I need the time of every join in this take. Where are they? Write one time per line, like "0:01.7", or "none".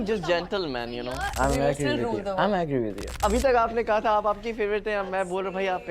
0:01.3
0:03.2